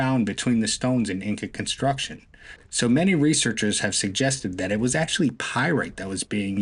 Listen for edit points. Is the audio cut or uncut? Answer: uncut